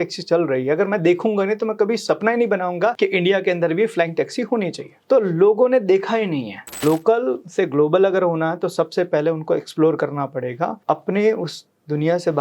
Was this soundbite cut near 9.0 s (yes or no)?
no